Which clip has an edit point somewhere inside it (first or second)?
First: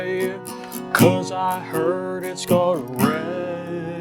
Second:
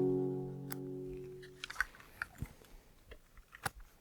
second